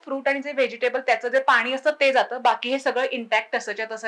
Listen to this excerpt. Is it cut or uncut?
uncut